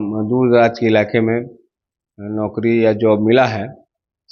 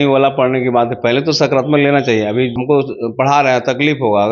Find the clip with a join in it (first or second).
second